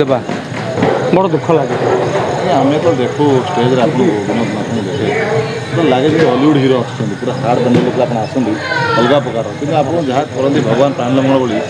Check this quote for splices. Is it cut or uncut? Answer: uncut